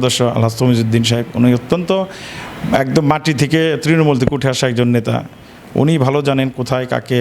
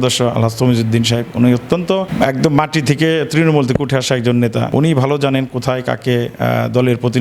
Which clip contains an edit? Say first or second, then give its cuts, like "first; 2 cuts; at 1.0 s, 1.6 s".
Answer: second; 2 cuts; at 2.1 s, 4.7 s